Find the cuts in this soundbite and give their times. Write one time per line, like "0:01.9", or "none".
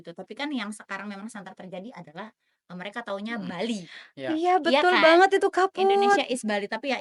none

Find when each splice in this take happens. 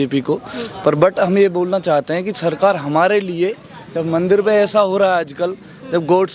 none

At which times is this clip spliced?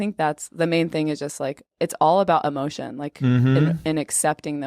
0:01.7

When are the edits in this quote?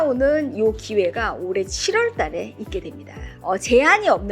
0:03.3

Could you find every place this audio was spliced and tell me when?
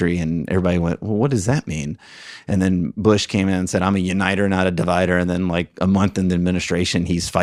none

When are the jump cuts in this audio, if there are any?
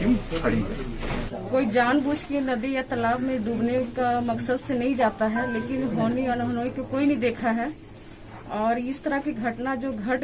0:01.0

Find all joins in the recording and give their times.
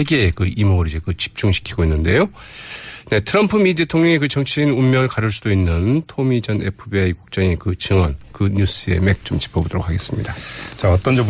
0:10.3

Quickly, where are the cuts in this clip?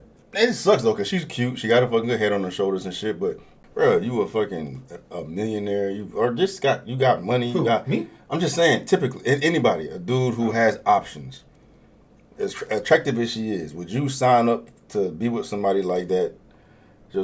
0:03.6

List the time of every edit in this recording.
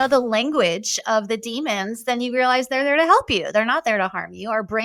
none

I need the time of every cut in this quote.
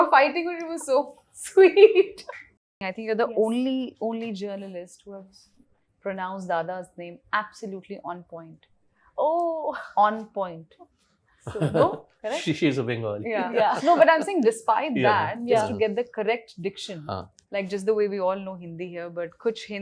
0:02.8

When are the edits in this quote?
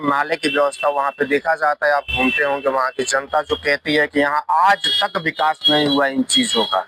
none

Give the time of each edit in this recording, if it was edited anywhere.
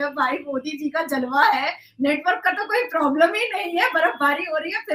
none

